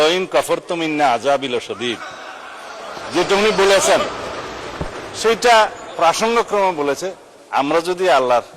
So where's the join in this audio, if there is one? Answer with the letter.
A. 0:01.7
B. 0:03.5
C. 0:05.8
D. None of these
D